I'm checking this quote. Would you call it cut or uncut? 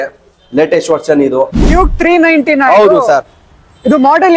cut